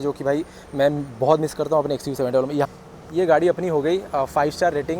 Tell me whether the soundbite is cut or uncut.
cut